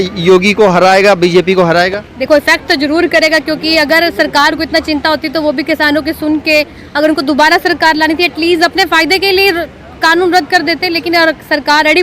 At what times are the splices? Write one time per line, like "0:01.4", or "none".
none